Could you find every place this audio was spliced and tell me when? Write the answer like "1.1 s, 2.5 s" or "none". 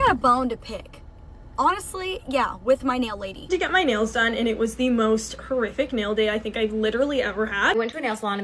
3.3 s, 7.7 s